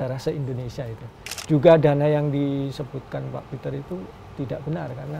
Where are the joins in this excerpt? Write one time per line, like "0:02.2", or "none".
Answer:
0:01.2